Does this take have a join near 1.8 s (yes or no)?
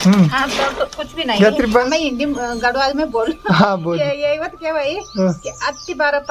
yes